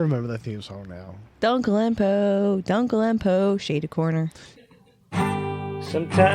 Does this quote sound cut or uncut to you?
cut